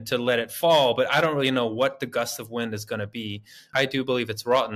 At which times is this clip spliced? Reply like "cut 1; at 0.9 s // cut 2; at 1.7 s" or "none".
cut 1; at 3.7 s